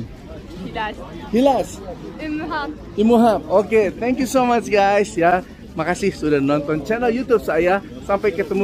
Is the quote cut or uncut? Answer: uncut